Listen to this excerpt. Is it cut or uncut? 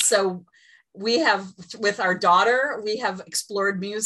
uncut